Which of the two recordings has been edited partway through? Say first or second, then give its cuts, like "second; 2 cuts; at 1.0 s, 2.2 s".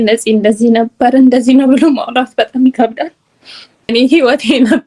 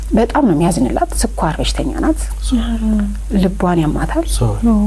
first; 1 cut; at 3.9 s